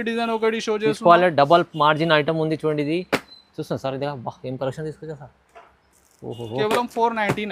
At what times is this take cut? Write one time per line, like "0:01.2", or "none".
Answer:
none